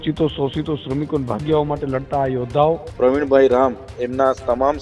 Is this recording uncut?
no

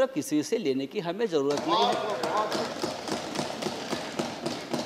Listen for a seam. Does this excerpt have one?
no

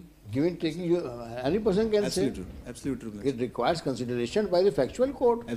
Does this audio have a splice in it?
no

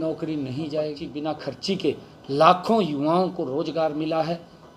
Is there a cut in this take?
yes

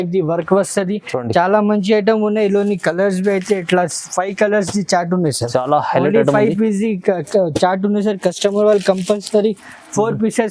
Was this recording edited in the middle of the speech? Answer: no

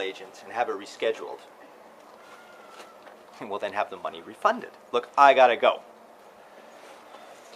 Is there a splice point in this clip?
yes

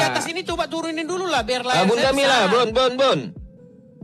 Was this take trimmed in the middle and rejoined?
no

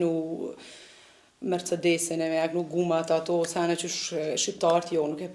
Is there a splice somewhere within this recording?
no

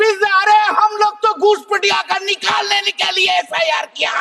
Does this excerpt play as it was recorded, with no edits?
yes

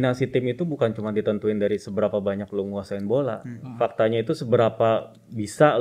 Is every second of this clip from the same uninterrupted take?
yes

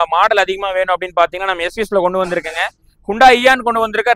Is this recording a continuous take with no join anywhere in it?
yes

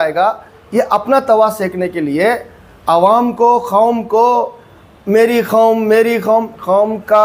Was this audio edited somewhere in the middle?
no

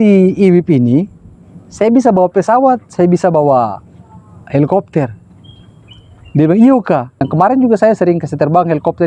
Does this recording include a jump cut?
no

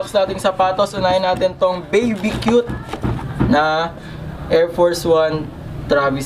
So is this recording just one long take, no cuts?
yes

